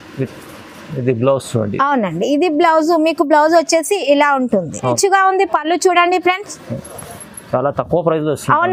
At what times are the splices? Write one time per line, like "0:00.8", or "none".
0:05.0